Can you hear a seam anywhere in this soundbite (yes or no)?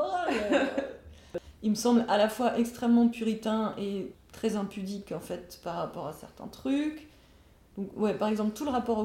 yes